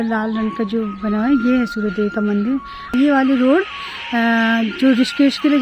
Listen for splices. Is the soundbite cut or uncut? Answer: cut